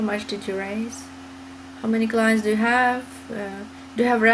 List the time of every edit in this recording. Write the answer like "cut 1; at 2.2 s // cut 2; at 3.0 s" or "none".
none